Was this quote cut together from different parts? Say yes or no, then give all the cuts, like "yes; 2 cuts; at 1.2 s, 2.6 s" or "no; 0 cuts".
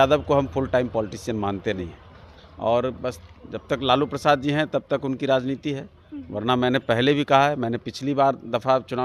no; 0 cuts